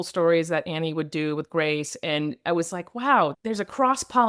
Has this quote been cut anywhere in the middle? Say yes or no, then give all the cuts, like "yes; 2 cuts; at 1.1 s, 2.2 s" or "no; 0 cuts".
no; 0 cuts